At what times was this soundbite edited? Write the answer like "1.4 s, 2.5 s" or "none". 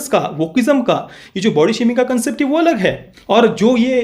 3.1 s